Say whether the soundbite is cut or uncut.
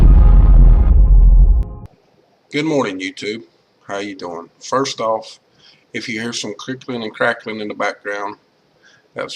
cut